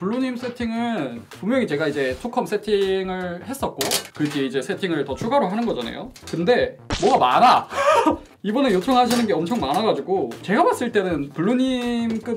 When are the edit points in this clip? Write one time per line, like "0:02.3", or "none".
none